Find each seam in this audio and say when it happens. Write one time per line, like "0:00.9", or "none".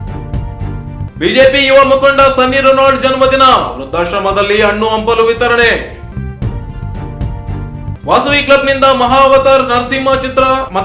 0:01.1